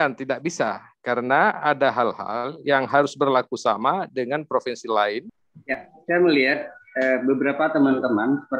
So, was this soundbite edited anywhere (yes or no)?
yes